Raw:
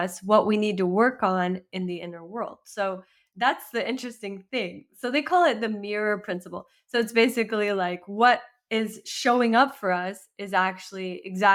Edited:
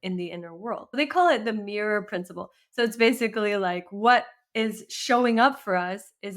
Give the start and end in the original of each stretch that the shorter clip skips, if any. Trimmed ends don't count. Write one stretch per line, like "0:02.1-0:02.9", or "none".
0:02.6-0:05.1